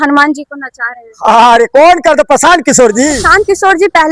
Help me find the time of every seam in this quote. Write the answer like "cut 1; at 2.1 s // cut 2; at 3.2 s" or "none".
cut 1; at 3.2 s